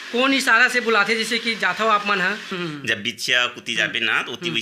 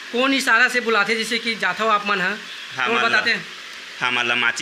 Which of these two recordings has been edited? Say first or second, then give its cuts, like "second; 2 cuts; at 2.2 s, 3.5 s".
first; 1 cut; at 2.5 s